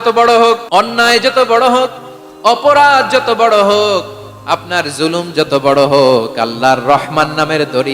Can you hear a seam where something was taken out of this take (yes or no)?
yes